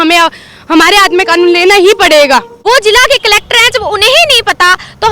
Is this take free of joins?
no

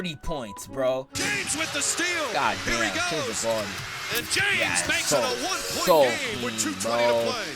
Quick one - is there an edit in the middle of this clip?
yes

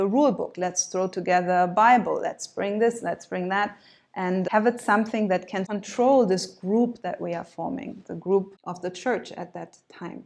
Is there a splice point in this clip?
yes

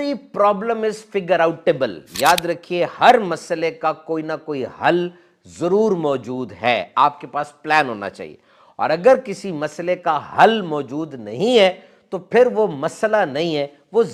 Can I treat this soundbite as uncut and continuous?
yes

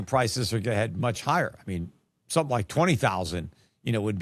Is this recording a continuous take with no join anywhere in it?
yes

